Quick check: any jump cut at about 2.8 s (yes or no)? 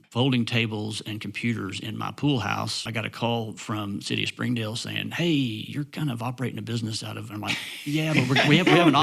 yes